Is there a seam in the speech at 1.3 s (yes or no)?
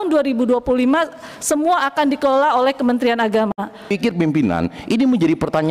no